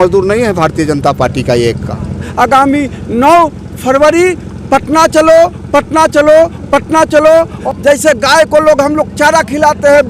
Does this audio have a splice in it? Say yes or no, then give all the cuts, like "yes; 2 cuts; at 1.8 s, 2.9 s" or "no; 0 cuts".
yes; 2 cuts; at 2.3 s, 7.6 s